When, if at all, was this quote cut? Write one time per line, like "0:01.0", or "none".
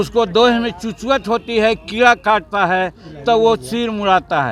none